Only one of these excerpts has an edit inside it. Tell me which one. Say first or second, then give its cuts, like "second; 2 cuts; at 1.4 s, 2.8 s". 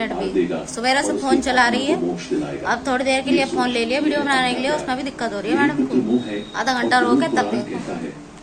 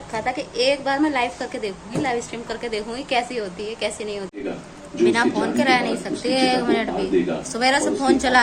second; 1 cut; at 4.3 s